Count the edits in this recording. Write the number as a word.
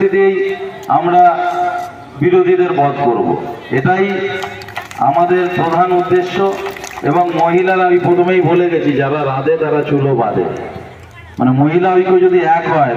zero